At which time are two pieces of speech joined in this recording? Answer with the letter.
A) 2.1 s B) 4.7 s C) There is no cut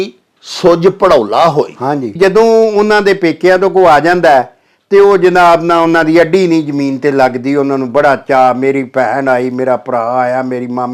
A